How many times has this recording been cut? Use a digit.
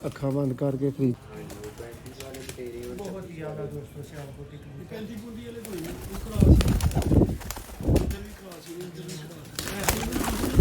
1